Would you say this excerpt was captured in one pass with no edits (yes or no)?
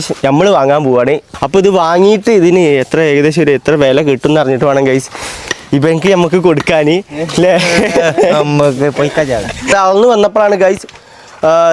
no